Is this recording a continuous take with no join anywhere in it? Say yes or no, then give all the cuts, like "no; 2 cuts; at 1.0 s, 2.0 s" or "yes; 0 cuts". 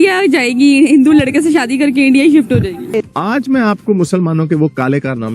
no; 1 cut; at 2.8 s